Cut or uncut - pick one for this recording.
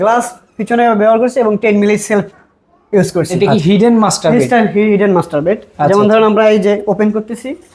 cut